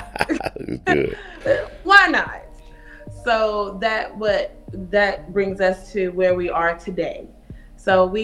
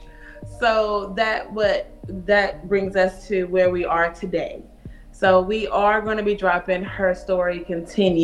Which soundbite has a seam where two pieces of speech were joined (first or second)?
first